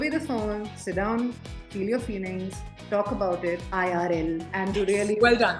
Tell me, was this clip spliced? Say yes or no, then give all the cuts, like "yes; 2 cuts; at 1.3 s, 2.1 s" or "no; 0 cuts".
yes; 2 cuts; at 3.7 s, 4.5 s